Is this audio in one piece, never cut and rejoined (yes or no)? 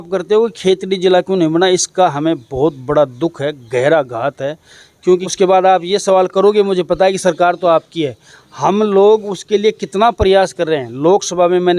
no